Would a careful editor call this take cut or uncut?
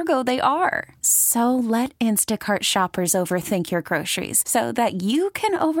uncut